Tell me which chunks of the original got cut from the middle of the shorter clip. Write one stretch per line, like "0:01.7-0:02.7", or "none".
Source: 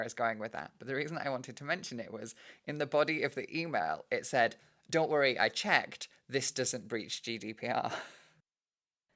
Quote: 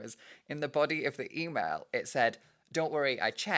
none